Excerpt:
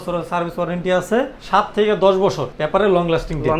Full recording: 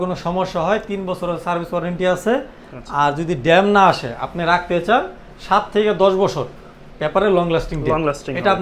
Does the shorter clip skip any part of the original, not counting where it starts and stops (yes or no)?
yes